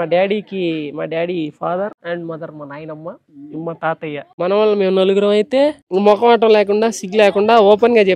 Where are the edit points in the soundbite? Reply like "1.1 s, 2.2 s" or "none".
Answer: 4.3 s